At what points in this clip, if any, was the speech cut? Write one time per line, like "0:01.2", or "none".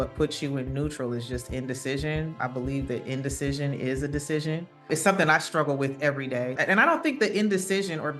0:02.4
0:04.9
0:06.6